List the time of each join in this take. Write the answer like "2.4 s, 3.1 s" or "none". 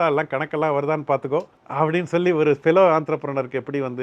1.6 s